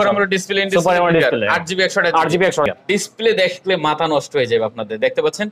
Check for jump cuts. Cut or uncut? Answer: cut